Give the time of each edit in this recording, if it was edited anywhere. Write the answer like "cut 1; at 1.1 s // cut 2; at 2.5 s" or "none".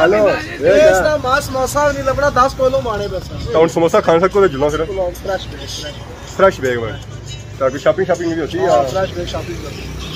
cut 1; at 3.4 s